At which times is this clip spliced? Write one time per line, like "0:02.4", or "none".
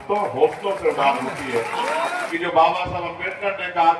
0:02.3